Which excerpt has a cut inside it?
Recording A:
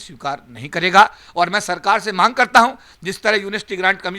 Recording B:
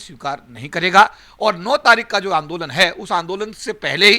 B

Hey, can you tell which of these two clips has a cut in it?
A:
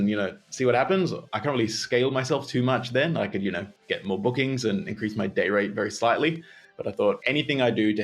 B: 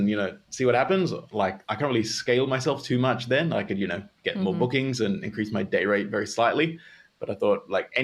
A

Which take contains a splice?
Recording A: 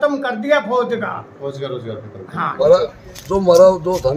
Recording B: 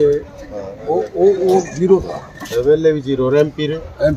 A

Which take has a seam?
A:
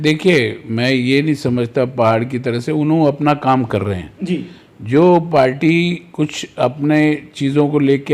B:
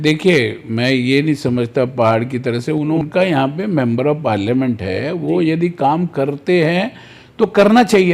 B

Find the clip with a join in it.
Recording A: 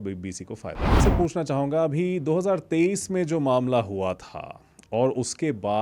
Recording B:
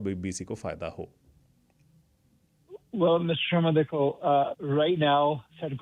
A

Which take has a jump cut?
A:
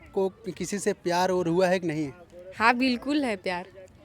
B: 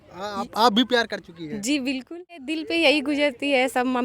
B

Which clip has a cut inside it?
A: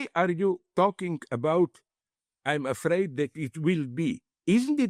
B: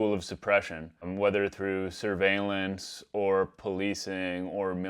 B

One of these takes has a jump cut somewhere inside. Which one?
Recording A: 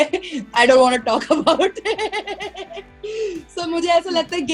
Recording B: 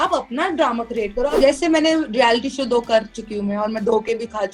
B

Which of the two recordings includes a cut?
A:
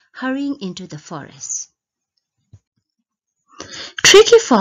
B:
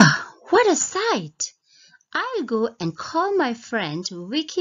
B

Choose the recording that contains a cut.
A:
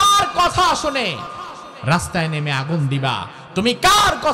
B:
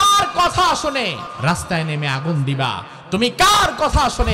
B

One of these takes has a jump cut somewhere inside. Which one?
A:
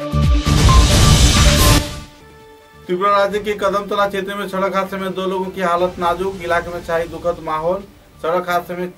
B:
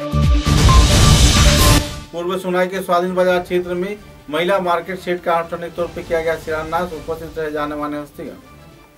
B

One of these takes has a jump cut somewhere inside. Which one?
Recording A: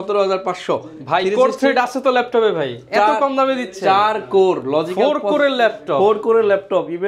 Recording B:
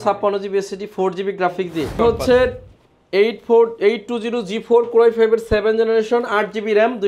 B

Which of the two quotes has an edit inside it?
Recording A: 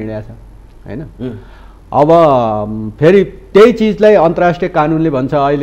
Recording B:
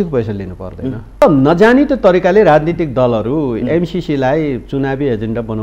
B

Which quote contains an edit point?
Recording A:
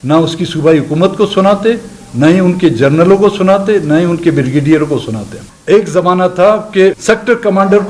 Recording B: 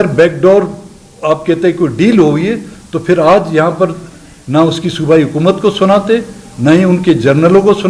A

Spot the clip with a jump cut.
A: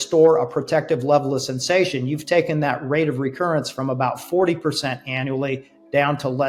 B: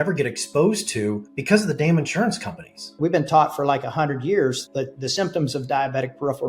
B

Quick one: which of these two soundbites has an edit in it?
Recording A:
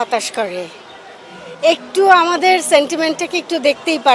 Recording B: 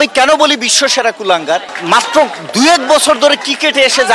B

